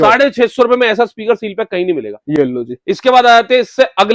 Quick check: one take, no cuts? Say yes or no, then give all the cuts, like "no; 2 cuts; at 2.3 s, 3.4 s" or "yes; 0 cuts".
yes; 0 cuts